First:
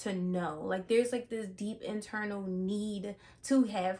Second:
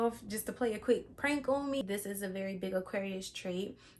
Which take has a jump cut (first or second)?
second